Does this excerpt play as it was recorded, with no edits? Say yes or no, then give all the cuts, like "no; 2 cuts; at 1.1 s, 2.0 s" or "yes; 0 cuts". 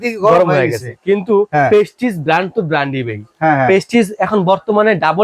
yes; 0 cuts